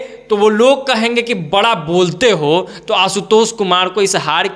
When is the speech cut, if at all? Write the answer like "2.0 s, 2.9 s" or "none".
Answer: none